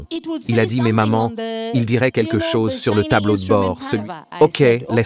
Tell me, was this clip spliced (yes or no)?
yes